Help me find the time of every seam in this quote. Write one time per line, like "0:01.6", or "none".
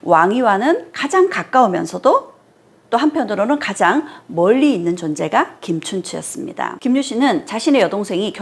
0:06.7